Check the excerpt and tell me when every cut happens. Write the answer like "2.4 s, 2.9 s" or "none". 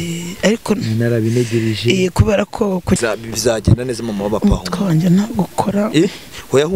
3.0 s

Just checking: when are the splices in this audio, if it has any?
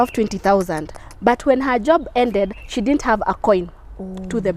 none

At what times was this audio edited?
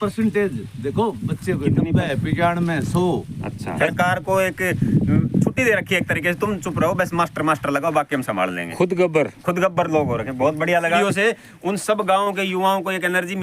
3.9 s, 11.0 s

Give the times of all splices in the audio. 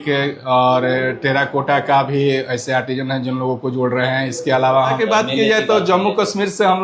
5.0 s

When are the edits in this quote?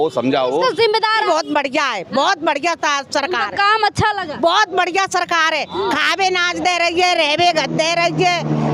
1.2 s

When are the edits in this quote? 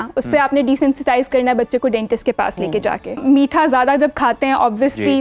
3.2 s

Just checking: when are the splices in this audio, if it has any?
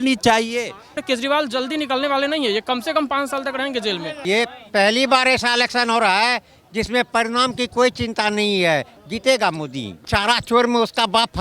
1.0 s, 4.1 s, 9.0 s, 10.1 s

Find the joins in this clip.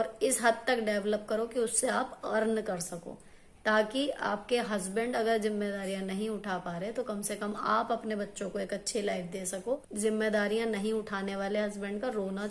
9.9 s

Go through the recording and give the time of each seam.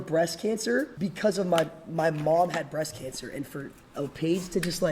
0.9 s

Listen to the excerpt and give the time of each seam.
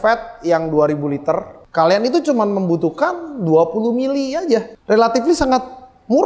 1.6 s, 4.7 s

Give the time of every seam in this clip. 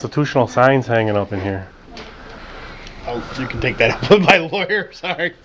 none

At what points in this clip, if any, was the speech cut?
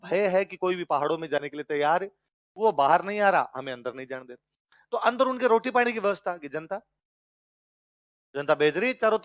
none

